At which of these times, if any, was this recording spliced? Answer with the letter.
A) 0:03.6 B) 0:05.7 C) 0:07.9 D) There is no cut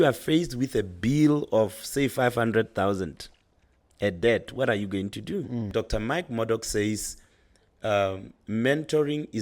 B